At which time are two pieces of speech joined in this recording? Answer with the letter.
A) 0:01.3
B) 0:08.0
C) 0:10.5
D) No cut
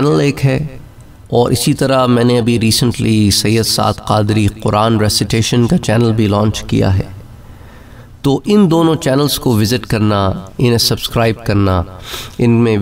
D